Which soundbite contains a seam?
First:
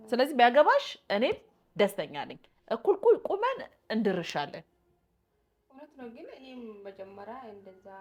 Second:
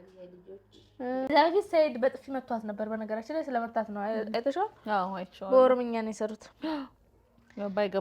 second; 1 cut; at 1.3 s

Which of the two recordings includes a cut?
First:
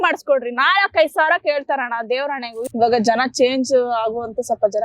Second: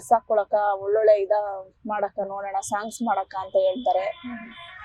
first; 1 cut; at 2.7 s

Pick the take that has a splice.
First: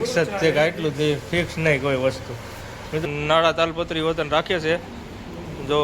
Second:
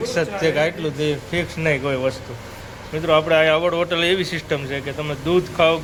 first; 1 cut; at 3.0 s

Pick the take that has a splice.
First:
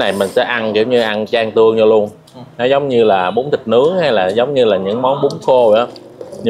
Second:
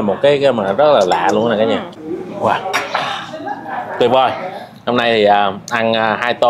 second; 1 cut; at 1.8 s

